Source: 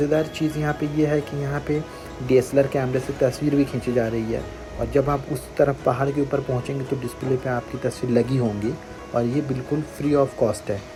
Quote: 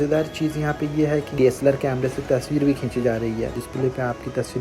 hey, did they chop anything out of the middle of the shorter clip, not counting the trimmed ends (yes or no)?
yes